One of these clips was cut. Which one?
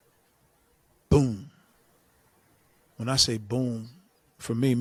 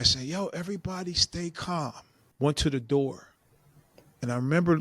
second; 1 cut; at 2.3 s

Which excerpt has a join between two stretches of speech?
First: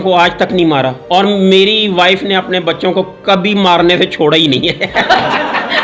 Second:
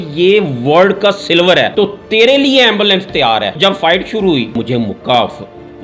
second; 3 cuts; at 1.7 s, 3.6 s, 4.6 s

